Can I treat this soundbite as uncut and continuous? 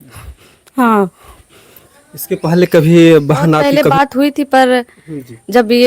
no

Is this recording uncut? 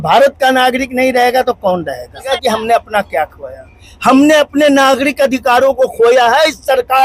no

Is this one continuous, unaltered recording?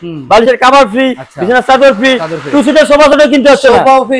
yes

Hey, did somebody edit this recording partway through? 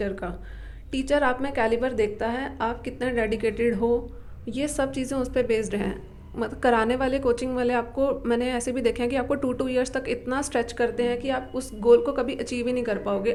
no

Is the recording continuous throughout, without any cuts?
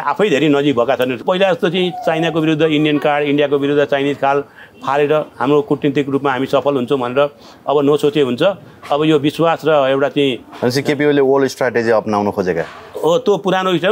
no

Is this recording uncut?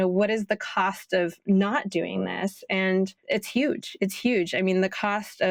yes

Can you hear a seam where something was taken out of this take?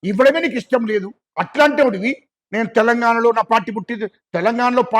yes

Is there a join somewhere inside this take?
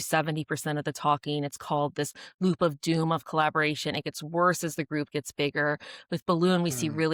no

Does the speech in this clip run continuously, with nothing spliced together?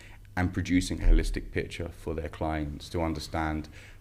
yes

